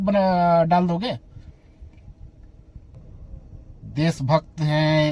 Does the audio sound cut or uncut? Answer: cut